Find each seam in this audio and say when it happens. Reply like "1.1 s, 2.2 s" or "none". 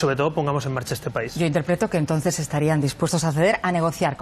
1.4 s